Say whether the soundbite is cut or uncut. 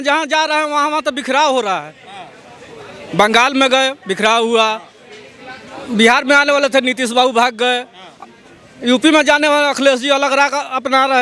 uncut